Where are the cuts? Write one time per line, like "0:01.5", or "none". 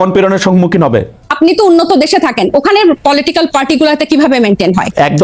0:01.2